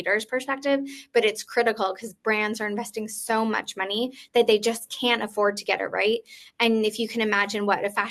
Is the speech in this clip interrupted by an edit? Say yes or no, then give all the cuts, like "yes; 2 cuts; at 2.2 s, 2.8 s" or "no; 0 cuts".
no; 0 cuts